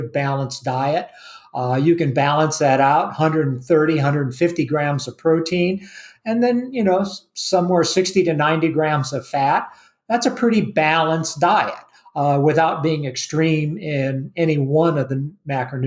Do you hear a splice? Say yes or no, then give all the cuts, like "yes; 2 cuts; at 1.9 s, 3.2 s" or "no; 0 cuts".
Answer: no; 0 cuts